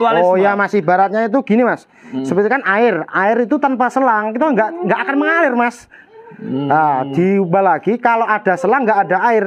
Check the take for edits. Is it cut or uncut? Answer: uncut